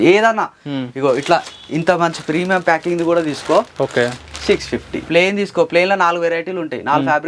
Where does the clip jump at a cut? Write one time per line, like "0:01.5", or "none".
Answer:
0:05.1